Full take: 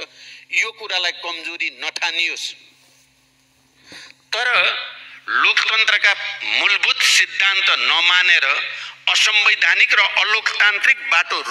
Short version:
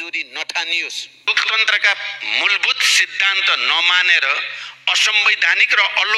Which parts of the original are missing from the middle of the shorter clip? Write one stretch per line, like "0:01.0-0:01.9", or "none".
0:02.7-0:05.5

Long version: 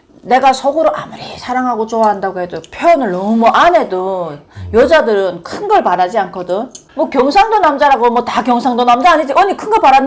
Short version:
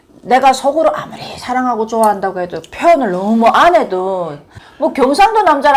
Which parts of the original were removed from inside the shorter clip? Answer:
0:04.5-0:06.7

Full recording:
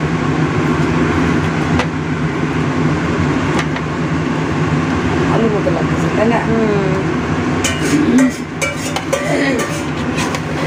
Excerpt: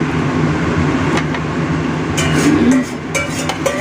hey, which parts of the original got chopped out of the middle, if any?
0:04.6-0:07.7

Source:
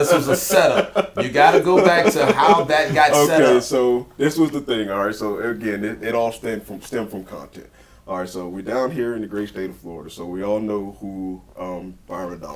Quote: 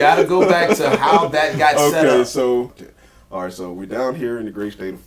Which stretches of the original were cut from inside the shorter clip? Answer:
0:04.1-0:07.5

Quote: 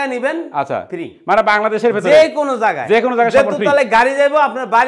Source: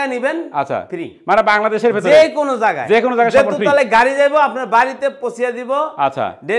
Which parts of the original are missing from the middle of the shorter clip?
none

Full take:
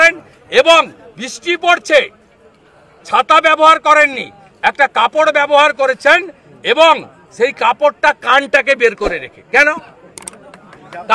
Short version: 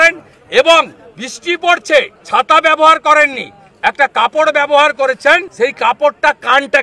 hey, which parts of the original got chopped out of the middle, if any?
0:02.2-0:03.0
0:06.3-0:07.3

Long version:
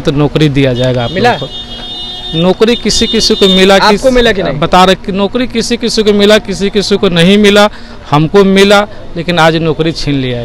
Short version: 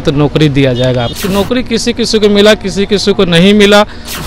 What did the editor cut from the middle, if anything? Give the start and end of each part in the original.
0:01.1-0:05.0

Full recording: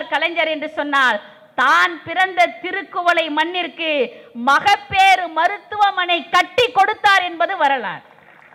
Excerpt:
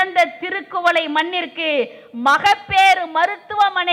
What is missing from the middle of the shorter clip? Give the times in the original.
none

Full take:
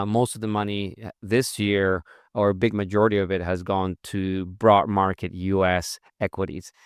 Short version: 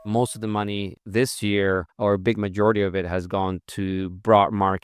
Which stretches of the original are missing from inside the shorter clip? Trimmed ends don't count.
0:01.0-0:01.1
0:02.1-0:02.3

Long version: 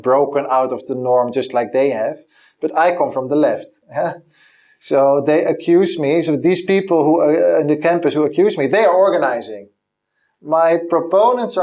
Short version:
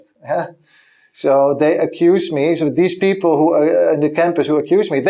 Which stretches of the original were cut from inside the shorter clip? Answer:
none

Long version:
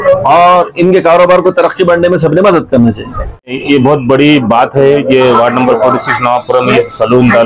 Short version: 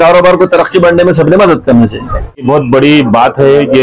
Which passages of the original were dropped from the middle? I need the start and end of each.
0:03.5-0:03.8

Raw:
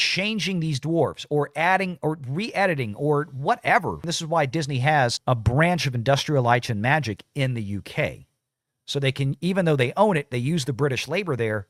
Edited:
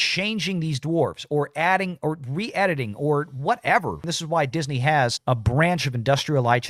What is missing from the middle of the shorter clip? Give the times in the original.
none

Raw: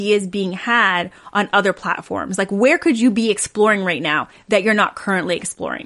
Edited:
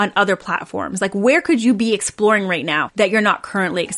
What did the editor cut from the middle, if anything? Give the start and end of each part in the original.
0:04.2-0:04.4

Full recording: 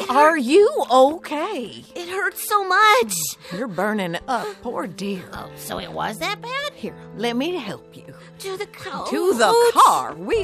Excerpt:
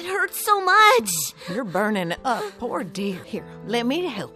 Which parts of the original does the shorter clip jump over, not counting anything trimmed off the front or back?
0:05.3-0:06.7

